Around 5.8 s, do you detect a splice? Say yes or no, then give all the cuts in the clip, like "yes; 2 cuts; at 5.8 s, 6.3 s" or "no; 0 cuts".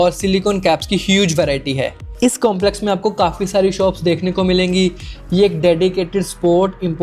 no; 1 cut; at 2.1 s